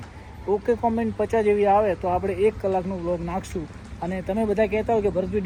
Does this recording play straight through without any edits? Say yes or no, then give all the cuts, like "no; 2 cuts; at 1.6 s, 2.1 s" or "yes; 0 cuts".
yes; 0 cuts